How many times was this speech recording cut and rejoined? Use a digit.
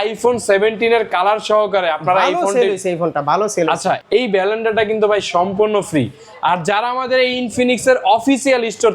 1